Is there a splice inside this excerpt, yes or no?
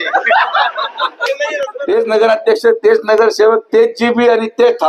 yes